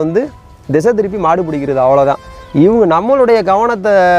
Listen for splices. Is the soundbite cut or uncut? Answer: uncut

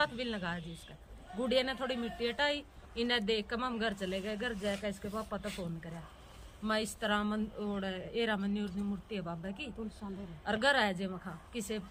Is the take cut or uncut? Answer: uncut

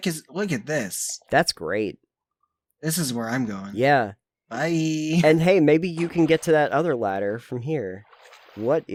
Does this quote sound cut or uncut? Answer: uncut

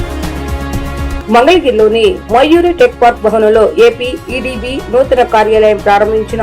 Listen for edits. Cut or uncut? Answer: cut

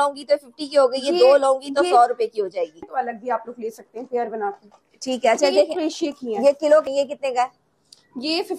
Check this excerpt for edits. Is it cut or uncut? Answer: cut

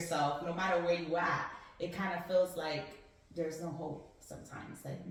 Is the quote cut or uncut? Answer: uncut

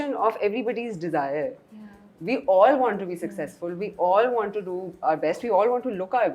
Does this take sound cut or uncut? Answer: uncut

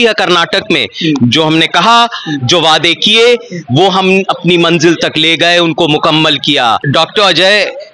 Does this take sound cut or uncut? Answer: cut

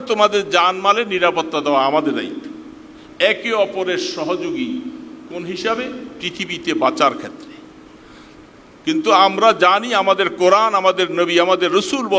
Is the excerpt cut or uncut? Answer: uncut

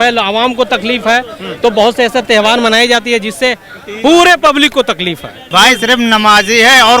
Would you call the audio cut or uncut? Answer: cut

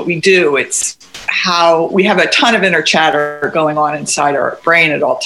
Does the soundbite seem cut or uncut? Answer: uncut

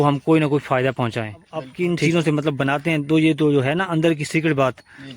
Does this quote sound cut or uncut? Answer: cut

